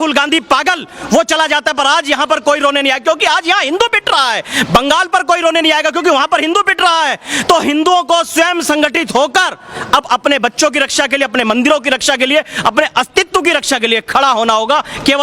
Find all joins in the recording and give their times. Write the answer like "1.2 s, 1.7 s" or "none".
none